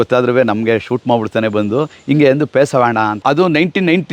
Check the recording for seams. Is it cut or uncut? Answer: cut